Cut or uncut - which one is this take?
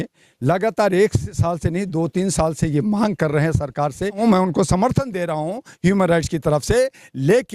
cut